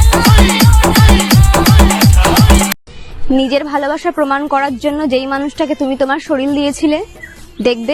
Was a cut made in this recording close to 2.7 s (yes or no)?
no